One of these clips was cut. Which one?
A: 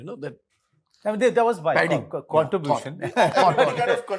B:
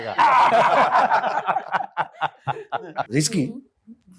B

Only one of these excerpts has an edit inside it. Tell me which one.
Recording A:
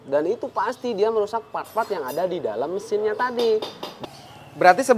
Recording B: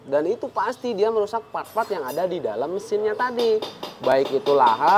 A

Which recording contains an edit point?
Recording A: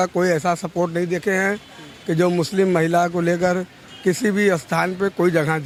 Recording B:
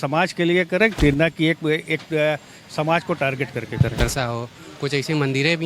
B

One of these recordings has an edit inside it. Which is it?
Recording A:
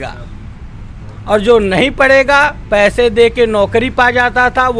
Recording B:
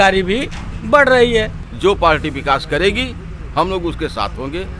B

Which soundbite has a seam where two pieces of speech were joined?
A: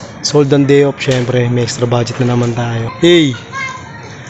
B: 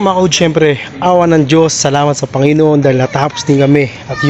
A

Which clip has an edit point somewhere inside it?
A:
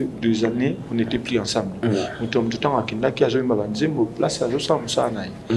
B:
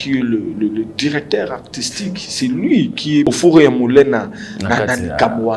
B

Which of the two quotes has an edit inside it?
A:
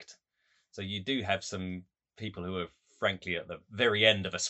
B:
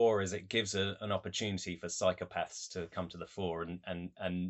A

